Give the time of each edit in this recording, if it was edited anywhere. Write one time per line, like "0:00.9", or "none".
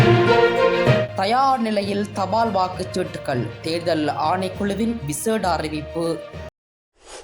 0:01.0